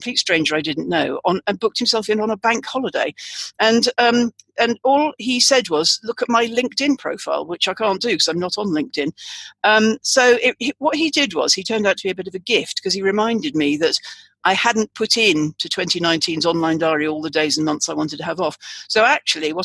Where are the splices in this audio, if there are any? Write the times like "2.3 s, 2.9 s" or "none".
none